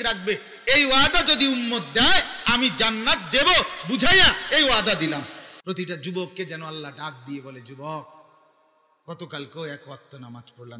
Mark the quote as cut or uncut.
cut